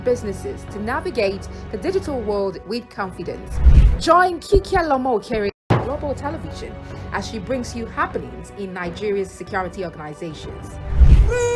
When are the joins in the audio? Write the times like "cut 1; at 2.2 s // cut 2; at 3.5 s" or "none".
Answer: cut 1; at 1.0 s